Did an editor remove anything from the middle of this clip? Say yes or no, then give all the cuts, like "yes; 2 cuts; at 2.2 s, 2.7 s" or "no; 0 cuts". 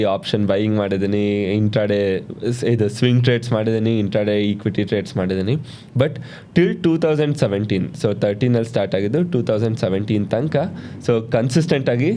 no; 0 cuts